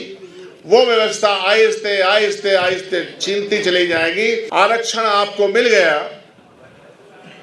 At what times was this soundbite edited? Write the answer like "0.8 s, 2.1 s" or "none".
4.5 s